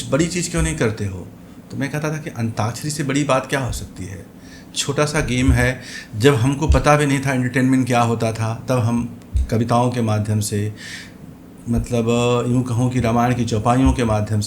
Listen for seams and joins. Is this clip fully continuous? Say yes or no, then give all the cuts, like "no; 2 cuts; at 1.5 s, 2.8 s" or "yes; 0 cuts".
yes; 0 cuts